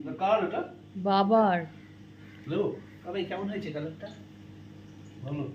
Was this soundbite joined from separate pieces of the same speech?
no; 0 cuts

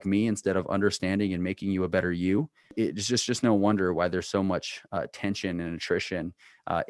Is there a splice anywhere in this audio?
yes; 1 cut; at 2.7 s

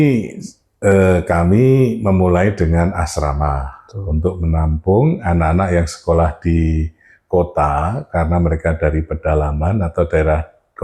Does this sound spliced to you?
no; 0 cuts

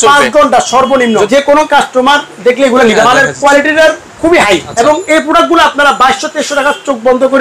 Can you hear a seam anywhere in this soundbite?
yes; 3 cuts; at 1.3 s, 3.0 s, 4.7 s

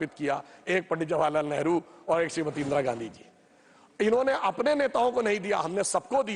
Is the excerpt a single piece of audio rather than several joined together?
yes; 0 cuts

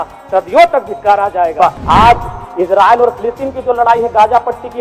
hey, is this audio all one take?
no; 1 cut; at 1.8 s

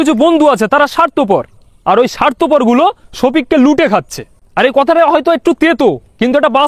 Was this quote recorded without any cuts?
yes; 0 cuts

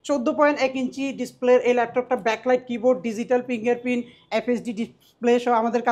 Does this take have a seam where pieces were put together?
no; 0 cuts

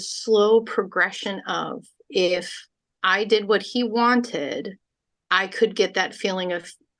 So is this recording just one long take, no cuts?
yes; 0 cuts

